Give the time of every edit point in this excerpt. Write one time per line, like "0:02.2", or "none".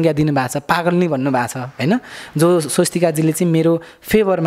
none